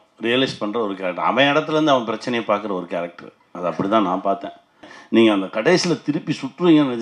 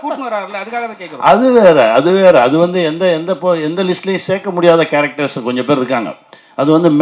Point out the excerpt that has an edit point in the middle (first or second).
first